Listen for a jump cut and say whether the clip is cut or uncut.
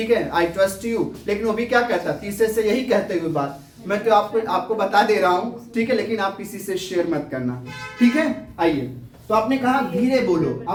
uncut